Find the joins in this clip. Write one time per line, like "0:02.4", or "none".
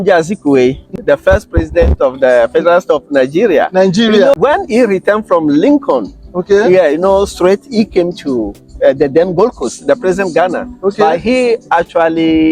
0:00.9
0:04.3